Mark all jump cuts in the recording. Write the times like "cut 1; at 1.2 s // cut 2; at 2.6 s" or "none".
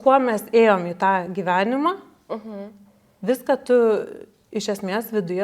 none